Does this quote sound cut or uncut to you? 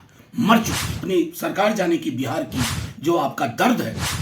cut